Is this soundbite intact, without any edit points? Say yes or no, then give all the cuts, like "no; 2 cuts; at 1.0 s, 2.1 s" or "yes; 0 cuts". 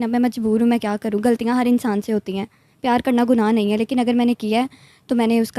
yes; 0 cuts